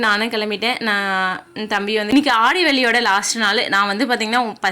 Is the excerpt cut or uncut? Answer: cut